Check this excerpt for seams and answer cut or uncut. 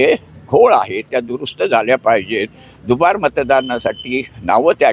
uncut